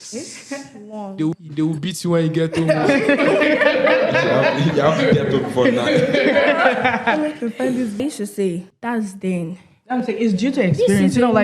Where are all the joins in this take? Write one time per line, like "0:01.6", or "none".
0:08.0